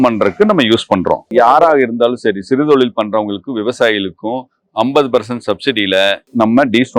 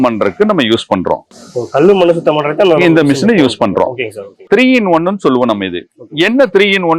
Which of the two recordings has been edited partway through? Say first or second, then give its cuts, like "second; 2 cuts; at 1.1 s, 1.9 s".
first; 1 cut; at 1.2 s